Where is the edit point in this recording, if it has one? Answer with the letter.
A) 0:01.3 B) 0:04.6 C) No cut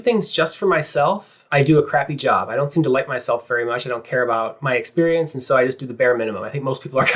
A